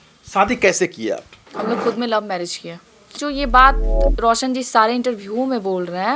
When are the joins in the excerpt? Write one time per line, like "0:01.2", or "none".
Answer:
0:03.2